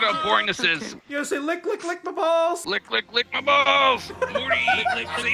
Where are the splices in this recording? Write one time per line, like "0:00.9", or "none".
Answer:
none